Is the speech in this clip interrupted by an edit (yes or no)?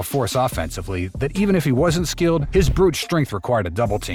no